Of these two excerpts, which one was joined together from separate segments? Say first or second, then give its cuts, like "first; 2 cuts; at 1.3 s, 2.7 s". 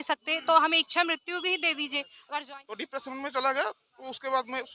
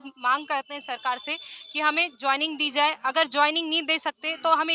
first; 1 cut; at 2.4 s